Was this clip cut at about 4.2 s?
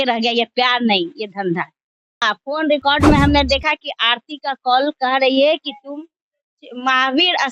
no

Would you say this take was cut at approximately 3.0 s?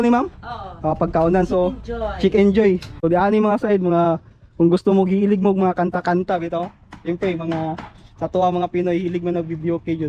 yes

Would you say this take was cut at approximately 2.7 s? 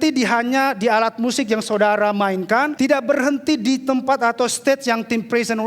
yes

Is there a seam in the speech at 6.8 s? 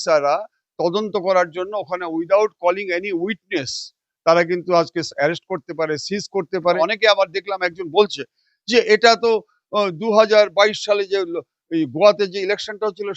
yes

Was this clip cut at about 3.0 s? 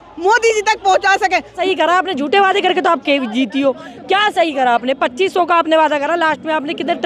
no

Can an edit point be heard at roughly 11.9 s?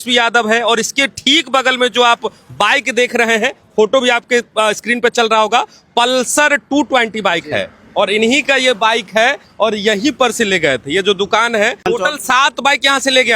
yes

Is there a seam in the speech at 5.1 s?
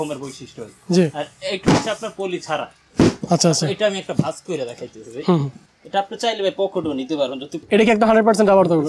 no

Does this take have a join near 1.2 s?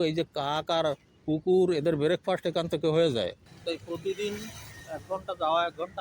no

